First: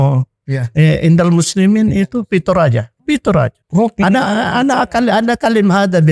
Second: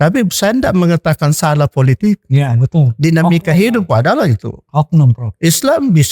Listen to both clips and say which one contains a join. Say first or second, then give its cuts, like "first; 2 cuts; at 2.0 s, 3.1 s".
first; 2 cuts; at 2.9 s, 3.6 s